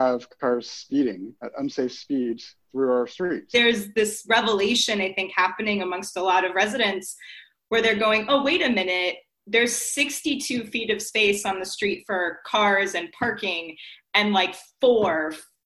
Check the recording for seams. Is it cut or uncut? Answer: cut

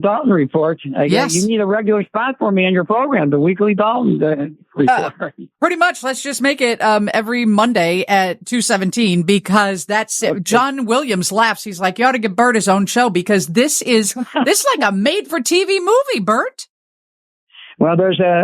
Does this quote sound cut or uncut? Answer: cut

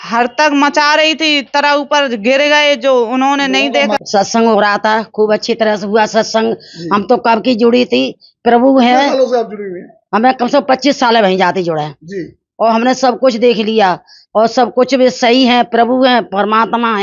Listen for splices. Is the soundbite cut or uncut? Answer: uncut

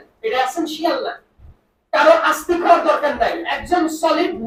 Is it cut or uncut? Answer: uncut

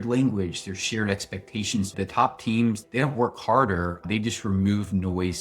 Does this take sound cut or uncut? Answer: cut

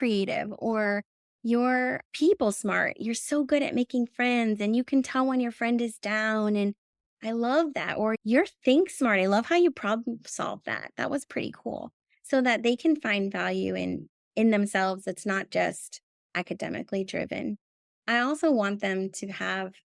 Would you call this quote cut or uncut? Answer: cut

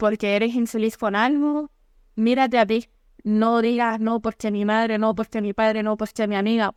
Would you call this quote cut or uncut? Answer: uncut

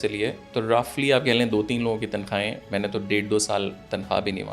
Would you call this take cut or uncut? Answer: uncut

